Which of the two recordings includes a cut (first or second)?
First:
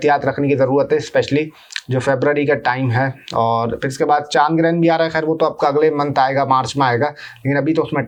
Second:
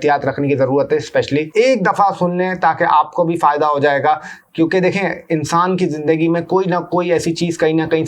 second